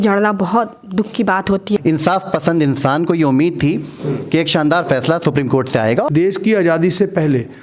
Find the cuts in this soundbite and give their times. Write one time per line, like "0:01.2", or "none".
0:01.8
0:06.1

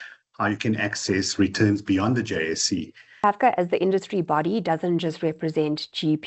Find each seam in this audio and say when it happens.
0:03.2

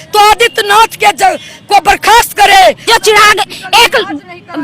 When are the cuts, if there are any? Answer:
0:02.9

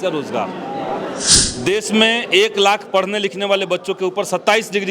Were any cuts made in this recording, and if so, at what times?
0:01.3

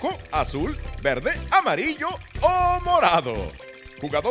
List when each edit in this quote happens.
none

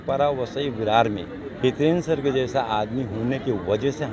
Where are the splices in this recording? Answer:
0:01.4

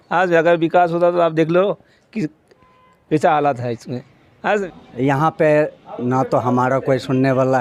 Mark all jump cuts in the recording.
0:04.7

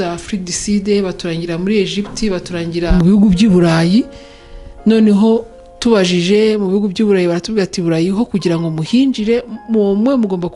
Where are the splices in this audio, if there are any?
none

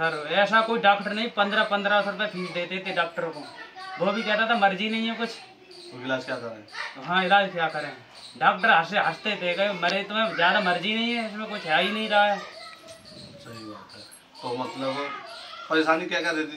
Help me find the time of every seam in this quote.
none

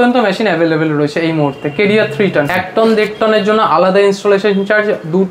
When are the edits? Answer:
0:02.6

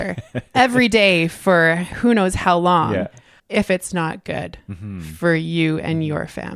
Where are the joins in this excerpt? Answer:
0:03.4

